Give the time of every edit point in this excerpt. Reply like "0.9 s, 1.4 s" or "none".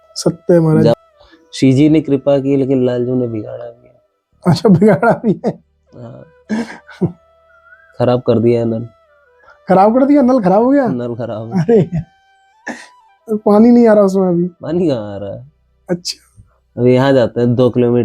0.9 s